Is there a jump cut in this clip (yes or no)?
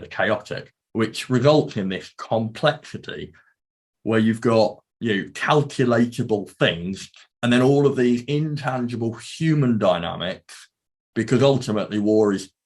yes